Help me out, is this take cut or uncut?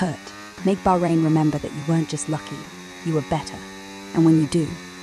uncut